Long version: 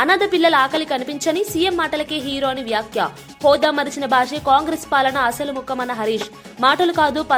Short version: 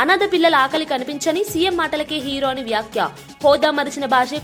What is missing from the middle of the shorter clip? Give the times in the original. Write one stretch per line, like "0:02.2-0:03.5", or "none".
none